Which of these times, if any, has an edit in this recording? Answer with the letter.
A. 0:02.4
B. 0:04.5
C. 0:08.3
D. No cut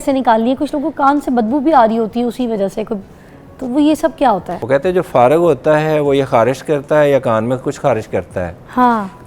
B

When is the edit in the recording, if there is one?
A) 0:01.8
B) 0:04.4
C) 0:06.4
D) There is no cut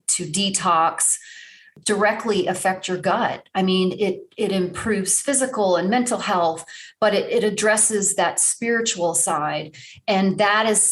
A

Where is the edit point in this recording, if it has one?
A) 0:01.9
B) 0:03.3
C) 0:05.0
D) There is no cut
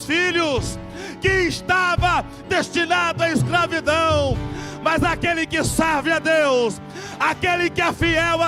D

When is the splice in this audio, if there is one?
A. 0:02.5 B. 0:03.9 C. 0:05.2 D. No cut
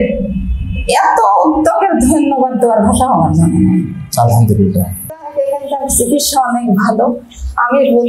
C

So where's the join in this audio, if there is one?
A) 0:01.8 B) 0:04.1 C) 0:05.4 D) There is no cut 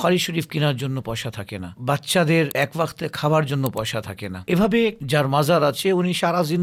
D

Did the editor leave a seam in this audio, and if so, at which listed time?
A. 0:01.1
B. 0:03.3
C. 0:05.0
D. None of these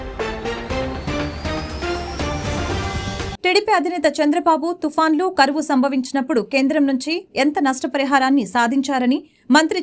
B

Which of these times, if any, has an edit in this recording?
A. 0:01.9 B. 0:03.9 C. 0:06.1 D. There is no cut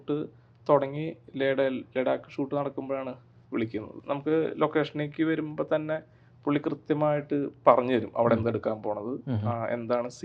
B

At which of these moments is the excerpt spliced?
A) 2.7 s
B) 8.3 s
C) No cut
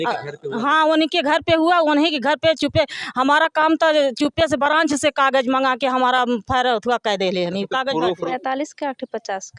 B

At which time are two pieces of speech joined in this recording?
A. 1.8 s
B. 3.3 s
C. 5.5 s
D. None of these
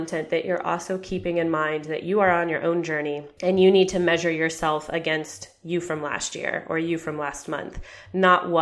B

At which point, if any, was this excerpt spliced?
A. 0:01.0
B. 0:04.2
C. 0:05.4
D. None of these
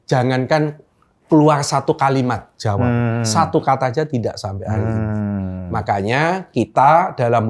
D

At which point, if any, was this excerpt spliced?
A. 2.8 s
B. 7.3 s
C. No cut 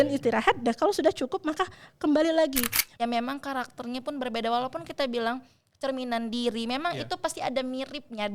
A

